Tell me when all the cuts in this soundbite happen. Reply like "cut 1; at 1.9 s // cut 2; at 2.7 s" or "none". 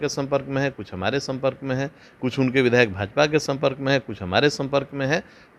none